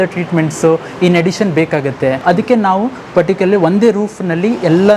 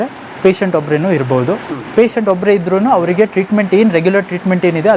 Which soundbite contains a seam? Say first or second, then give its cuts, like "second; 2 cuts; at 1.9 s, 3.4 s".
first; 1 cut; at 2.2 s